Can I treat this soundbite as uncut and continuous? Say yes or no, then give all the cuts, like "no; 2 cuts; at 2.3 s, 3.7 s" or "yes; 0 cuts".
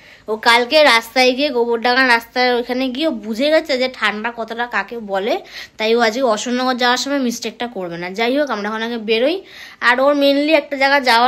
yes; 0 cuts